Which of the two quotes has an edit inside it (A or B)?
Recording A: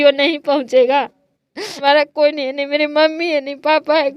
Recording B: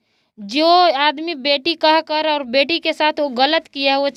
A